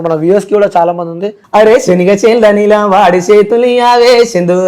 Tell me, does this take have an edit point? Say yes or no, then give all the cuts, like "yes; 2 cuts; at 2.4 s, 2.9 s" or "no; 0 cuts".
yes; 1 cut; at 1.3 s